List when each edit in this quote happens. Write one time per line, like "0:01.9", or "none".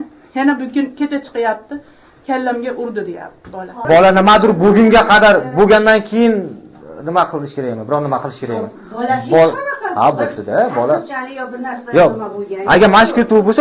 0:03.8